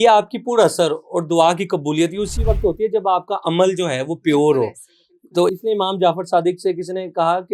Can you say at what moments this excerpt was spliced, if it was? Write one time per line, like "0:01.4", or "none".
0:05.5